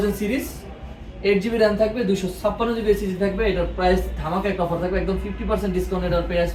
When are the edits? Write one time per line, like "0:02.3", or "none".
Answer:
none